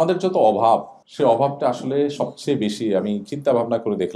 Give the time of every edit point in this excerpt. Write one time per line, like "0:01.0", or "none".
0:01.0